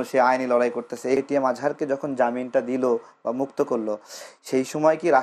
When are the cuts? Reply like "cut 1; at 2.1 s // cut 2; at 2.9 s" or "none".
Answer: cut 1; at 1.2 s